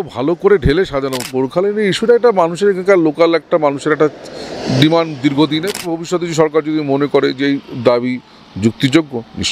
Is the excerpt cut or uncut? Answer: cut